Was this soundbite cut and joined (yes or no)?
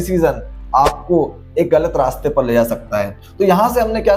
no